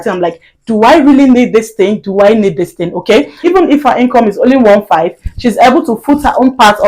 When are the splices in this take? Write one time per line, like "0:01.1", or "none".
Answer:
0:03.4